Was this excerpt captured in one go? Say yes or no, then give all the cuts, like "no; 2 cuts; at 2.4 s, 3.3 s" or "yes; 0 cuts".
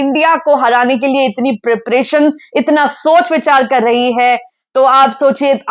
yes; 0 cuts